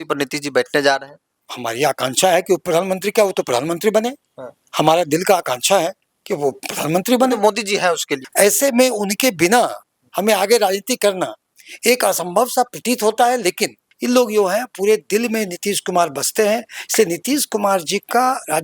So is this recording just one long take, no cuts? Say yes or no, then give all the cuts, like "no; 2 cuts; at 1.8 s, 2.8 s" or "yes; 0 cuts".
no; 2 cuts; at 8.2 s, 13.9 s